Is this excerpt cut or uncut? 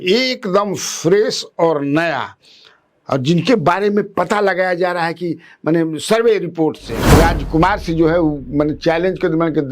cut